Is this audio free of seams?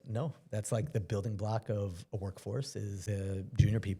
no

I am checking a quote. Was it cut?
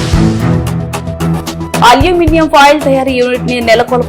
yes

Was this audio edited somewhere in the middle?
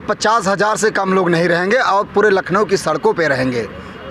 no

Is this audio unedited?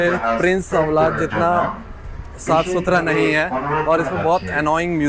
yes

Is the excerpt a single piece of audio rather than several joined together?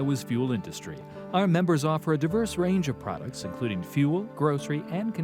yes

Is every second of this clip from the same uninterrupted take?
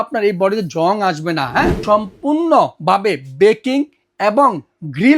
no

